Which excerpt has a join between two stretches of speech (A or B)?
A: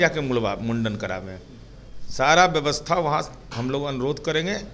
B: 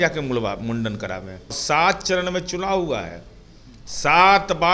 B